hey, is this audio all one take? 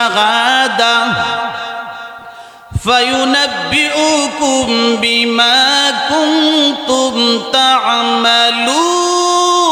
yes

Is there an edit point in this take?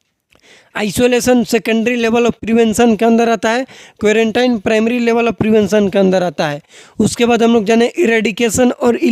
no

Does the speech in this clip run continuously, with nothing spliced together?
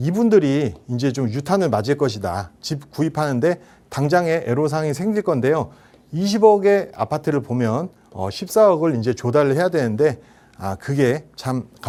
yes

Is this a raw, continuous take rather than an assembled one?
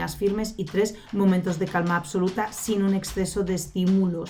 yes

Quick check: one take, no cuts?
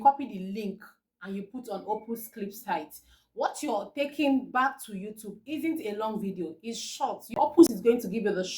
no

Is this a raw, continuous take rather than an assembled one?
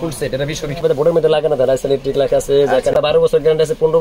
no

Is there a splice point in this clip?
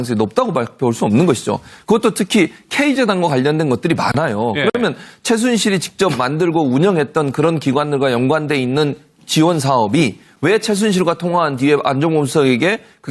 yes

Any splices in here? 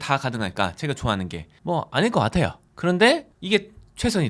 no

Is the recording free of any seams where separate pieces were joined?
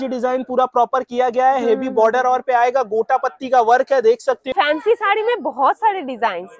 no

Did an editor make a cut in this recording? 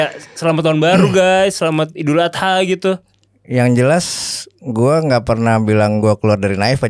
no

